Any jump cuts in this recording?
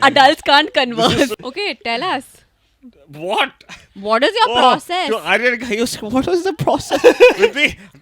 yes; 1 cut; at 1.3 s

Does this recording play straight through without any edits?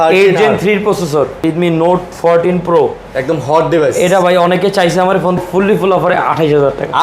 no; 2 cuts; at 1.4 s, 5.4 s

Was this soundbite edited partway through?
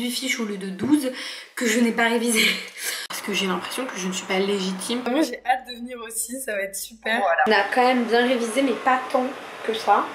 yes; 3 cuts; at 2.9 s, 5.1 s, 7.5 s

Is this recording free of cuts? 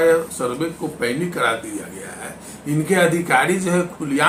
yes; 0 cuts

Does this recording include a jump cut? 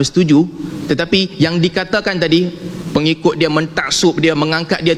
no; 0 cuts

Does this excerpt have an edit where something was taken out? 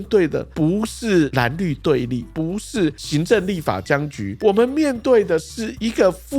yes; 1 cut; at 1.3 s

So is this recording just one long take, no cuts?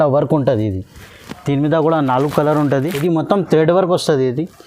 no; 1 cut; at 2.9 s

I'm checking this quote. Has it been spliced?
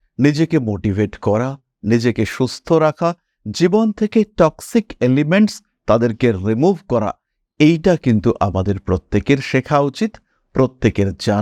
no; 0 cuts

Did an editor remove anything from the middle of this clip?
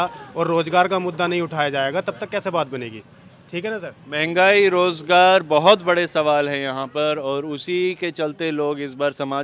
no; 0 cuts

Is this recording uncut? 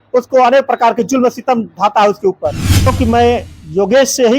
no; 1 cut; at 2.9 s

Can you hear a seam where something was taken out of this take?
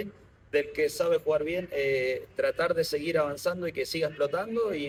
no; 0 cuts

